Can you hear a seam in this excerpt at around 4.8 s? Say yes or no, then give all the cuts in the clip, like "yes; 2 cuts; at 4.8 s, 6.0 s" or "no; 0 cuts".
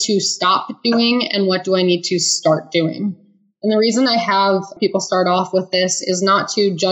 yes; 1 cut; at 4.8 s